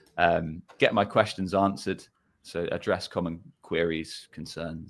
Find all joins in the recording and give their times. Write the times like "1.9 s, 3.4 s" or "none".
none